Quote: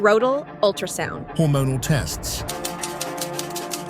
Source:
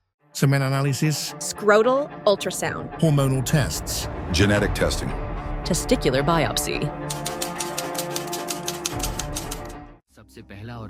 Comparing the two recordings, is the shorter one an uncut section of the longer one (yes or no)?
no